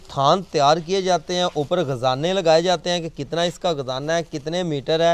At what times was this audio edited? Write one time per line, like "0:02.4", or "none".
none